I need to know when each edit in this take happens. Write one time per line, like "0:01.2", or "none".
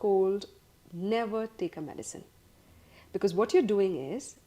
none